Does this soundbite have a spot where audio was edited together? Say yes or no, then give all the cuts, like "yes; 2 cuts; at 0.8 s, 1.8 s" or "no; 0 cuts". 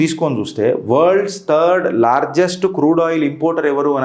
no; 0 cuts